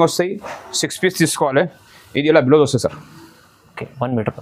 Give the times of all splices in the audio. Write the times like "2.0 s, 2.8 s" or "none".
none